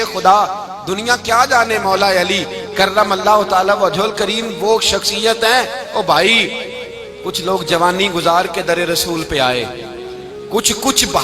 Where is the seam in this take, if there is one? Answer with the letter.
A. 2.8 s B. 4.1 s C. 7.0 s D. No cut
D